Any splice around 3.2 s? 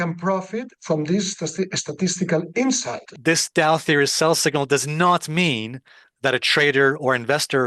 yes; 1 cut; at 3.2 s

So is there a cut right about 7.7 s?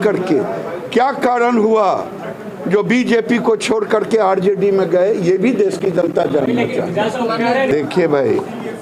yes; 1 cut; at 7.7 s

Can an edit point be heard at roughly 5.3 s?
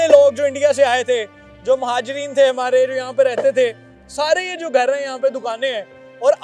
no; 0 cuts

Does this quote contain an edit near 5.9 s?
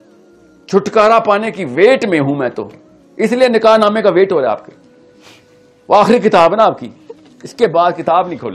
no; 0 cuts

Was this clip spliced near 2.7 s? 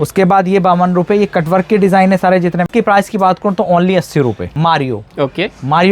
yes; 2 cuts; at 2.7 s, 4.5 s

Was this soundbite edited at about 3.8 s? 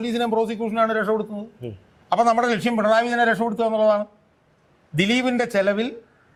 no; 0 cuts

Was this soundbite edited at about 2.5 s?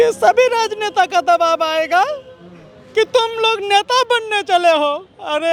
no; 0 cuts

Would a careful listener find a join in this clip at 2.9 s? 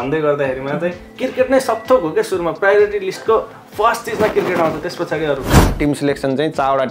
no; 2 cuts; at 1.1 s, 5.6 s

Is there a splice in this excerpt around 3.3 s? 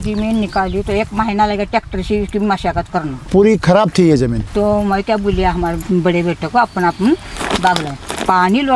yes; 3 cuts; at 3.3 s, 4.4 s, 5.8 s

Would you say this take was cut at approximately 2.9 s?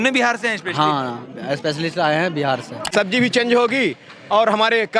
yes; 1 cut; at 2.9 s

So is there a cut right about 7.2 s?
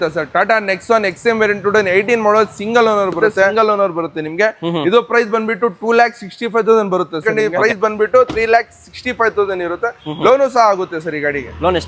yes; 2 cuts; at 3.5 s, 7.2 s

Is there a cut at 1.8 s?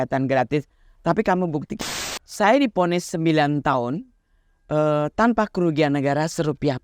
yes; 1 cut; at 1.8 s

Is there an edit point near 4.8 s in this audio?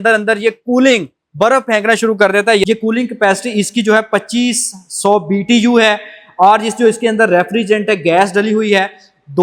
no; 1 cut; at 2.6 s

